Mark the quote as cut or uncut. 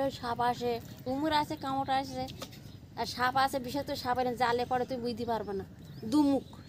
cut